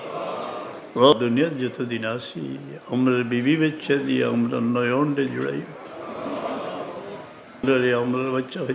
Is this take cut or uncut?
cut